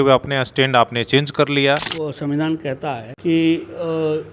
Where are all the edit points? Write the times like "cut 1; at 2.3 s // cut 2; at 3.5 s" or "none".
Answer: cut 1; at 1.9 s // cut 2; at 3.1 s